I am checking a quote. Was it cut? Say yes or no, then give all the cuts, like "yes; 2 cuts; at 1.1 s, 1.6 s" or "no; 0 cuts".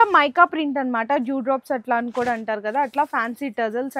no; 0 cuts